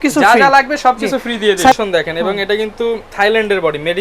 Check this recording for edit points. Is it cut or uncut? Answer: cut